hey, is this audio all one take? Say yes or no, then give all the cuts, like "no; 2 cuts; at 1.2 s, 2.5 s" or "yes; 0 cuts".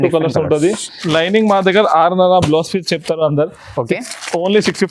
no; 1 cut; at 0.9 s